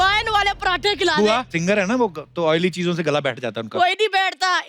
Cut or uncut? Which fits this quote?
cut